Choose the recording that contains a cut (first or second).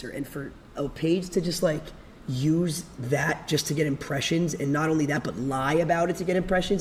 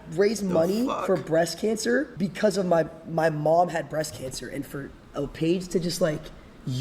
second